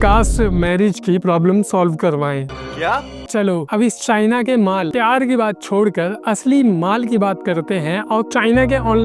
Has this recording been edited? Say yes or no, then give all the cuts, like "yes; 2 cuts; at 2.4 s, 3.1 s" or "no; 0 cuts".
no; 0 cuts